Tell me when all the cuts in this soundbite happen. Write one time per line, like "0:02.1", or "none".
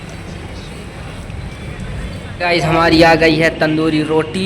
0:02.4